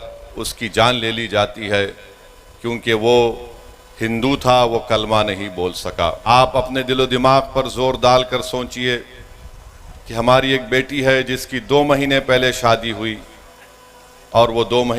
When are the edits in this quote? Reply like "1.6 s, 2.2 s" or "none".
6.2 s